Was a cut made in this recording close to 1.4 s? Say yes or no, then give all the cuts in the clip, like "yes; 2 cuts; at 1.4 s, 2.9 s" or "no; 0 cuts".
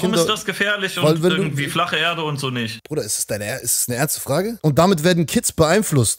no; 2 cuts; at 2.8 s, 4.5 s